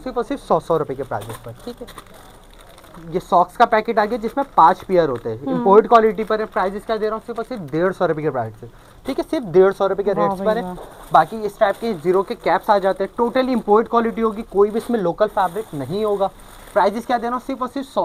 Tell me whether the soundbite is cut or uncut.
uncut